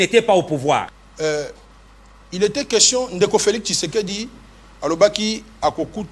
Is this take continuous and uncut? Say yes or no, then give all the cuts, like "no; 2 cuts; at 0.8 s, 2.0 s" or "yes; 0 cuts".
no; 1 cut; at 1.0 s